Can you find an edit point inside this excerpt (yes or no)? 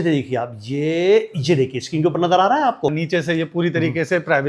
yes